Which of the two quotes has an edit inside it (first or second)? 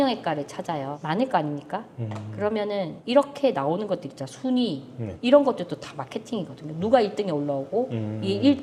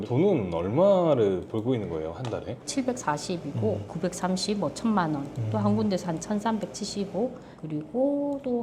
second